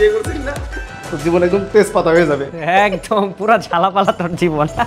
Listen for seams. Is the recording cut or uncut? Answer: uncut